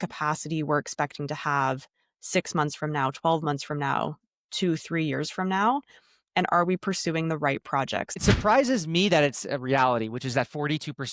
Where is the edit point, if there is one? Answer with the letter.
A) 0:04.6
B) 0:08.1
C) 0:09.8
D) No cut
B